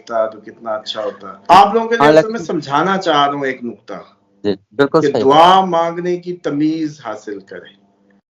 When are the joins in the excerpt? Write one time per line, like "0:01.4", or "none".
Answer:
0:01.3